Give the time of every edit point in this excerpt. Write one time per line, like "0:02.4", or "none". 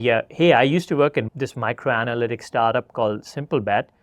0:01.3